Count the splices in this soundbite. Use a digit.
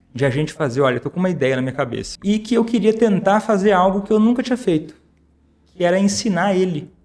1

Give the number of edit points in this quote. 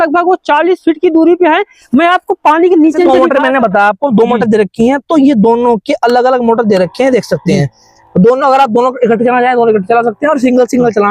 1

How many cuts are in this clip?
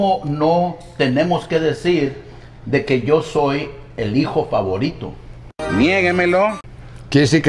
0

